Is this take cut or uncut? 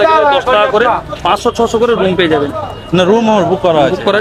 uncut